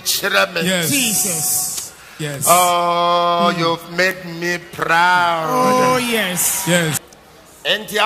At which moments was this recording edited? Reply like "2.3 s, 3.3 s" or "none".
7.1 s